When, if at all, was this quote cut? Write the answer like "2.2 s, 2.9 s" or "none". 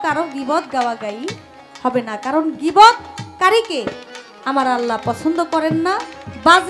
none